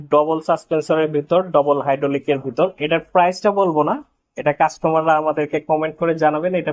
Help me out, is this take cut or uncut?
uncut